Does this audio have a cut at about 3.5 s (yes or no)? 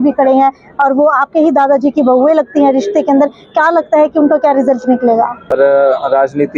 no